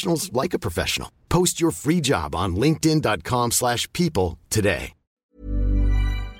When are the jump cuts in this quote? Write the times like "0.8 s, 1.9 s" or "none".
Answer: 5.1 s